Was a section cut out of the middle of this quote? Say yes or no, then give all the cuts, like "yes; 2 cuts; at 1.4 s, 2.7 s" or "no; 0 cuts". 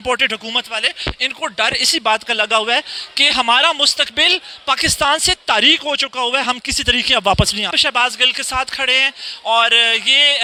no; 0 cuts